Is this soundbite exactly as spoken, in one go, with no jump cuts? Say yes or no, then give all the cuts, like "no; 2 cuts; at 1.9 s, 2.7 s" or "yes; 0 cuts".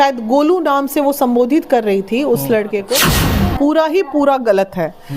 no; 1 cut; at 3.2 s